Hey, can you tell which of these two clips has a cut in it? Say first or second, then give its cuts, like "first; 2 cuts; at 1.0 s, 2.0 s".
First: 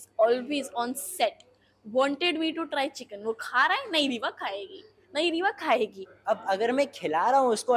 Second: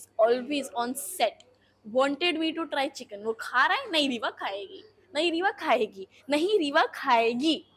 first; 1 cut; at 6.1 s